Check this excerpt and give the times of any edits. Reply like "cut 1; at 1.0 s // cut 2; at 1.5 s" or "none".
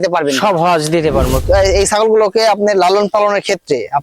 cut 1; at 1.4 s

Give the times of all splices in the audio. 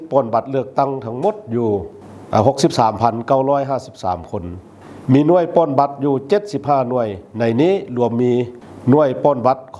none

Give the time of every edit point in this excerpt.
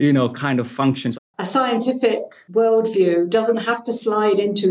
cut 1; at 1.1 s // cut 2; at 2.4 s

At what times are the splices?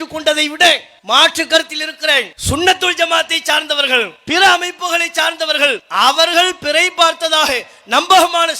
cut 1; at 0.9 s // cut 2; at 2.3 s // cut 3; at 4.2 s // cut 4; at 5.8 s

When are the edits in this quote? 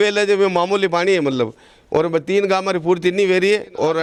none

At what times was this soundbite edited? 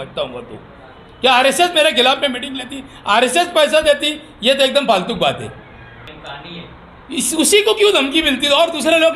cut 1; at 6.1 s

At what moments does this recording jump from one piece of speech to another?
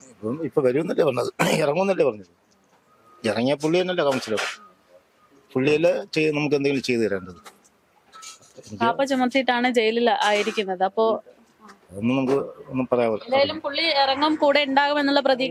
none

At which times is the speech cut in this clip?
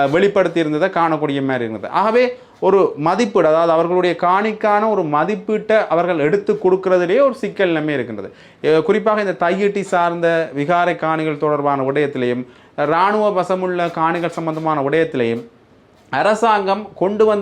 none

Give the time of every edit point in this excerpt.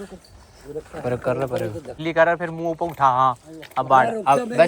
cut 1; at 2.0 s

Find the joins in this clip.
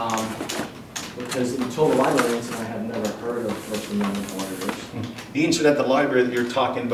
cut 1; at 5.2 s

